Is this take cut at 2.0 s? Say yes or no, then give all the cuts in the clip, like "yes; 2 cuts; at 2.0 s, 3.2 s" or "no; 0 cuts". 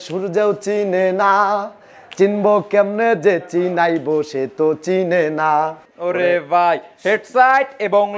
no; 1 cut; at 5.8 s